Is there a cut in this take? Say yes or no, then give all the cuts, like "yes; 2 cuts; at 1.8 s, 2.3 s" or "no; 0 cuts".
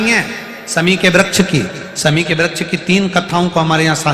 no; 0 cuts